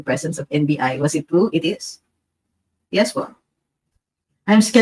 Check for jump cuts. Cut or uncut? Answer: uncut